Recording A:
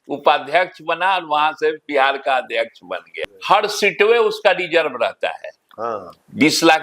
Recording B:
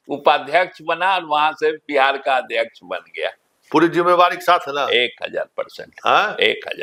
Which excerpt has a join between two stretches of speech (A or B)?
A